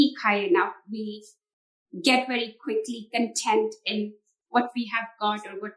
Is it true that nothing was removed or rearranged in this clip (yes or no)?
yes